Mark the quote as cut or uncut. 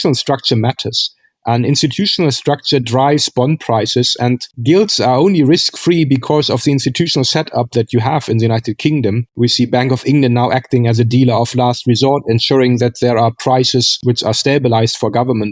uncut